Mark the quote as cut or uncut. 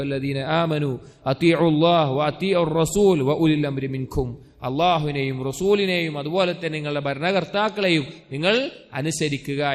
uncut